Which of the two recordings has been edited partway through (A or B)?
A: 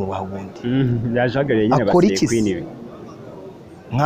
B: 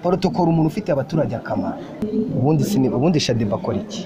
B